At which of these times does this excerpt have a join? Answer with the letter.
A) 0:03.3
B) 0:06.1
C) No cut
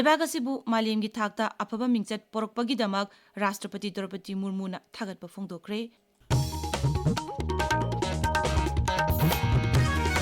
B